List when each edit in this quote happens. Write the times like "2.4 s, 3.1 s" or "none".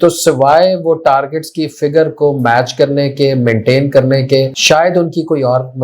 4.6 s